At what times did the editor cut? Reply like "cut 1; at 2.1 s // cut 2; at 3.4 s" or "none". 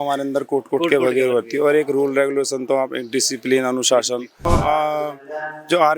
cut 1; at 4.4 s